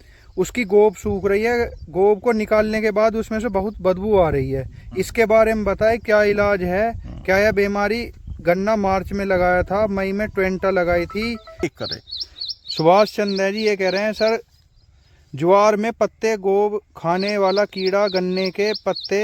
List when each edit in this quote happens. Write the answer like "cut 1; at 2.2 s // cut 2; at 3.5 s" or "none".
cut 1; at 11.6 s